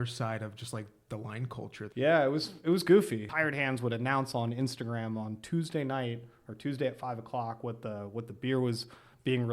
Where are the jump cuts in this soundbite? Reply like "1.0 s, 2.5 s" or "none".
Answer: 1.8 s, 3.2 s